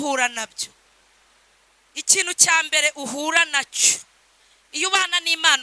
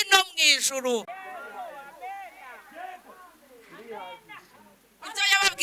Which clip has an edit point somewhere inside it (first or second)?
second